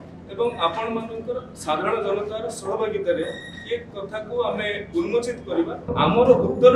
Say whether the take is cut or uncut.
cut